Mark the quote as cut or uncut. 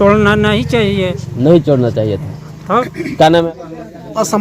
cut